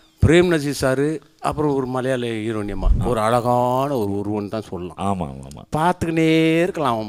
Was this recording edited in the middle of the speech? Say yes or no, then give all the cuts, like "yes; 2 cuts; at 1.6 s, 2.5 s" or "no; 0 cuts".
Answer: yes; 1 cut; at 2.9 s